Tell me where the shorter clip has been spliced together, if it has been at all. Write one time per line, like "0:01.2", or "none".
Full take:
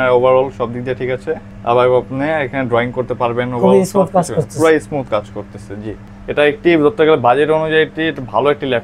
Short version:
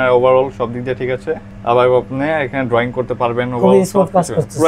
none